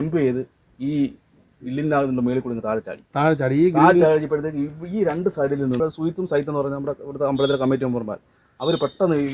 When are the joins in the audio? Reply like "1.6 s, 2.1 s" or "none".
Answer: 5.8 s